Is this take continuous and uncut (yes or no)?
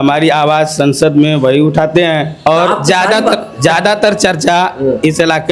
no